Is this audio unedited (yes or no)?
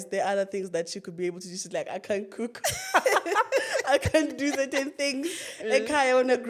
yes